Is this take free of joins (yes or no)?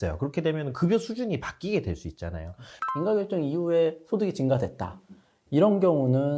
no